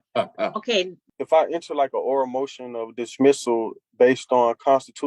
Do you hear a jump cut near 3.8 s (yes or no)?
no